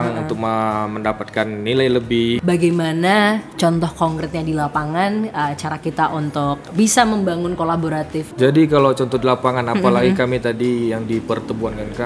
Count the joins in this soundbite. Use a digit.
2